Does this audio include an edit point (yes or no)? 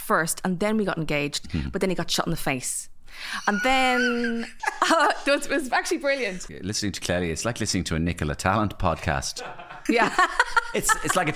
yes